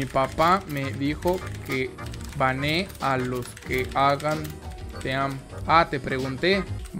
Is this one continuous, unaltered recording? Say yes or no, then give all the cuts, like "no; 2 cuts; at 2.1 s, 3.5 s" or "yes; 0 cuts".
yes; 0 cuts